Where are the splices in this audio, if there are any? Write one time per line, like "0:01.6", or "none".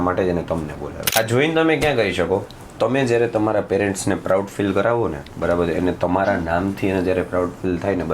0:00.9